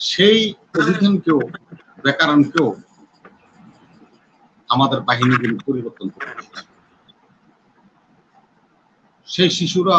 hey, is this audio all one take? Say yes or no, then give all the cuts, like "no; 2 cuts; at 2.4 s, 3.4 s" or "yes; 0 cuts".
yes; 0 cuts